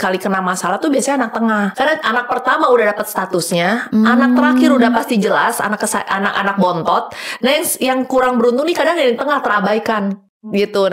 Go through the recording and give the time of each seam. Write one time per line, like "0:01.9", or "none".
0:01.7